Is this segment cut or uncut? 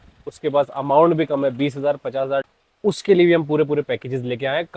cut